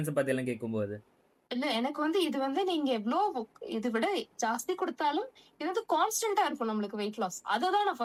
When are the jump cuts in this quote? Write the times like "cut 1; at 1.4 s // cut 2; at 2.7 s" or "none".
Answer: none

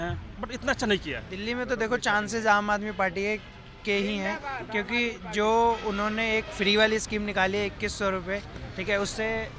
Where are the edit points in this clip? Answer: cut 1; at 1.3 s

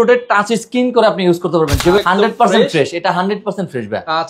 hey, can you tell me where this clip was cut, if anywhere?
cut 1; at 2.0 s

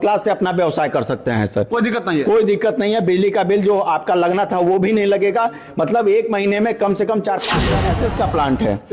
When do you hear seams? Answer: cut 1; at 7.7 s

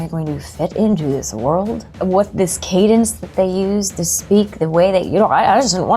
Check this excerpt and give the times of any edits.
cut 1; at 2.0 s

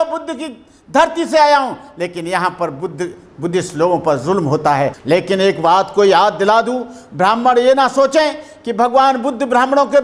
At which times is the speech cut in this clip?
cut 1; at 5.0 s

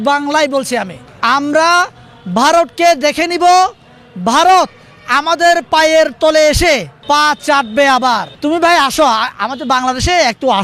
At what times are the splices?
cut 1; at 1.0 s // cut 2; at 6.9 s // cut 3; at 8.3 s

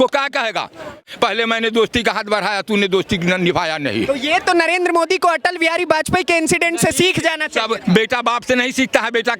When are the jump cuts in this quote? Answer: cut 1; at 1.0 s

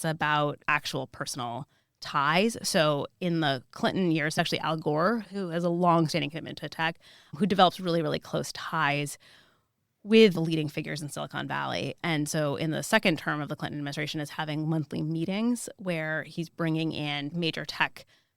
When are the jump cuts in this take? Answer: cut 1; at 4.3 s

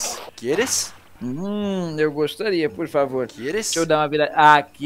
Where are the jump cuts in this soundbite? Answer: cut 1; at 1.0 s

